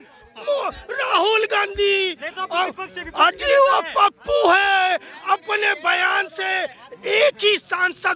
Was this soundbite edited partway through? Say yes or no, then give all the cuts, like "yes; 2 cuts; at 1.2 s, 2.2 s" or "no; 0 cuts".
no; 0 cuts